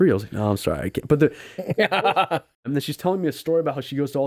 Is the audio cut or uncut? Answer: cut